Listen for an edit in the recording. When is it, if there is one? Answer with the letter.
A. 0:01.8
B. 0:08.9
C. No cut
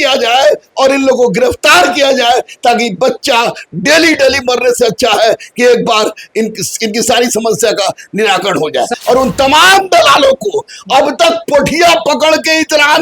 B